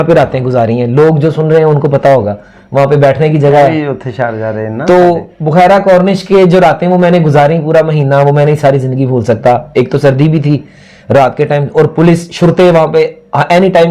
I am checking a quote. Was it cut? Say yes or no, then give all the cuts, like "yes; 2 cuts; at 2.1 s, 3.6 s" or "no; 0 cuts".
no; 0 cuts